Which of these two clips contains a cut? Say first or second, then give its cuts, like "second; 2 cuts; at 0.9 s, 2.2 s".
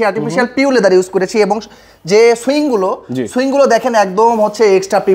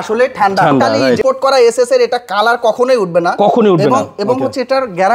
second; 1 cut; at 1.2 s